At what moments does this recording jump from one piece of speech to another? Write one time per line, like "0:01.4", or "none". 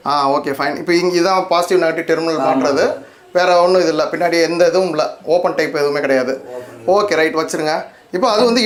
none